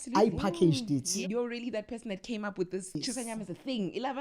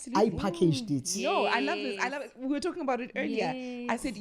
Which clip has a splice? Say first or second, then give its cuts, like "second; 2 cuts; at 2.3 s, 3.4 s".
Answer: first; 2 cuts; at 1.2 s, 3.0 s